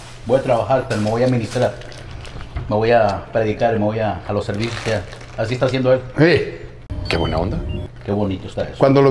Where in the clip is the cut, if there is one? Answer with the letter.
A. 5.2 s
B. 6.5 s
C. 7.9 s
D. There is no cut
C